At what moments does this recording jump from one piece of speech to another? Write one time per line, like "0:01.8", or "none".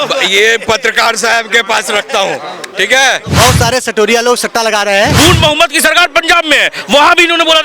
0:03.3
0:05.1